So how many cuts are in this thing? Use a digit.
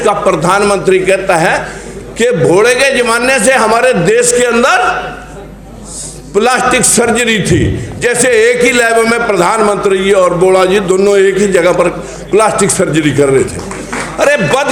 0